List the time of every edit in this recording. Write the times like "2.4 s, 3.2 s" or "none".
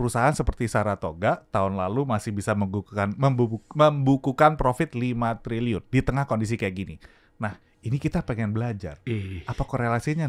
none